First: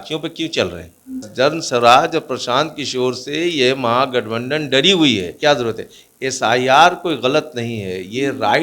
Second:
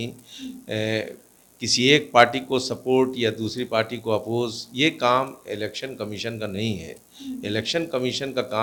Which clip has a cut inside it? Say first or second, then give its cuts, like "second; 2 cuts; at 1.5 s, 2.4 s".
first; 2 cuts; at 1.2 s, 5.3 s